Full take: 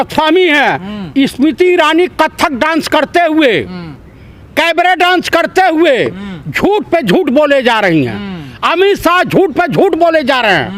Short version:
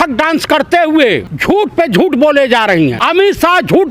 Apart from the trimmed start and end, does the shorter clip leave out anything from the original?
yes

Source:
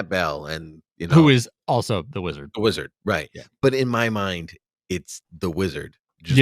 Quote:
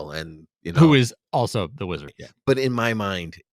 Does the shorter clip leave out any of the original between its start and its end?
yes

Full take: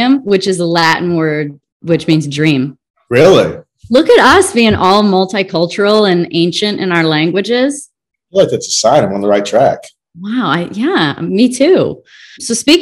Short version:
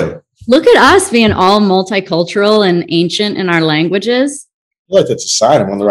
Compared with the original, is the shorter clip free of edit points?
yes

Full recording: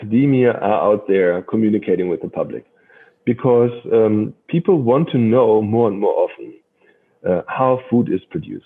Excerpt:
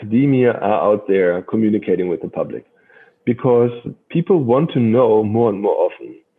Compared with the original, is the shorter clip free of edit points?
no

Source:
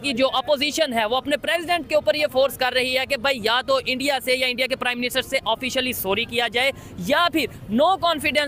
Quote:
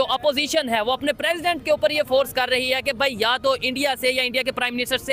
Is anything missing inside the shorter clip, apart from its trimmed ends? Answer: no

